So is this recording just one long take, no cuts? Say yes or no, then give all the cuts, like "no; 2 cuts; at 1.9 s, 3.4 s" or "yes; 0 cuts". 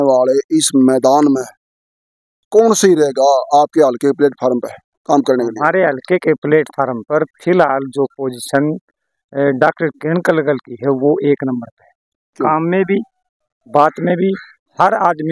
yes; 0 cuts